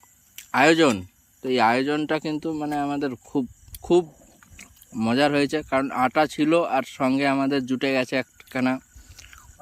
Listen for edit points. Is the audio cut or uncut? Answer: uncut